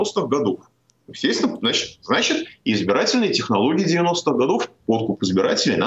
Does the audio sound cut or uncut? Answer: uncut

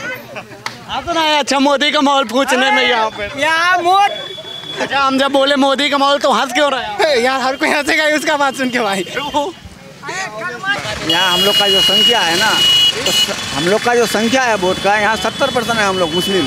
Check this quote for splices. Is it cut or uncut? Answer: cut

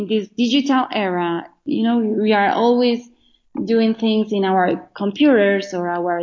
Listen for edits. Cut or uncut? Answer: cut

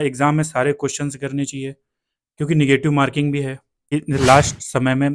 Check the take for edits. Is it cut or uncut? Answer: cut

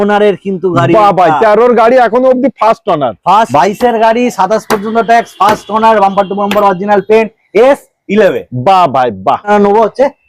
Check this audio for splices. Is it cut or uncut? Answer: cut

